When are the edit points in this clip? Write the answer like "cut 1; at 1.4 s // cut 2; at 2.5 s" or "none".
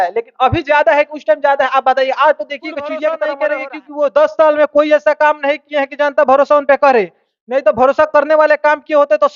cut 1; at 3.2 s